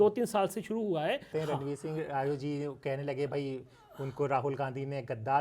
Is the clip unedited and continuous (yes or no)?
no